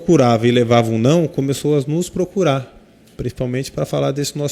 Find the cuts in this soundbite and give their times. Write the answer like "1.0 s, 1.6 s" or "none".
none